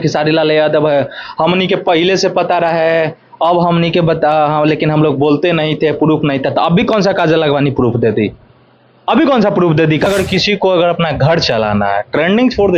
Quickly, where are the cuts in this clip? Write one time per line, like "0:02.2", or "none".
0:10.1